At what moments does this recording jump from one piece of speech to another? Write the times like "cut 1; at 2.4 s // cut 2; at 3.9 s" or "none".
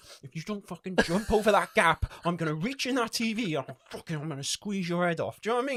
none